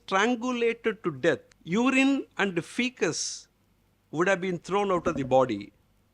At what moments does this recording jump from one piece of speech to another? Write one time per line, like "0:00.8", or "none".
0:01.5